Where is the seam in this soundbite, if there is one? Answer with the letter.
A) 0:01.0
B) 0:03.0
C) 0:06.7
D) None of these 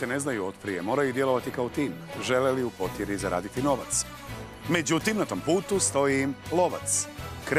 D